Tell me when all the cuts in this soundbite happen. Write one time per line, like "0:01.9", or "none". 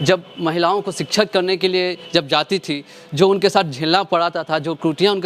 none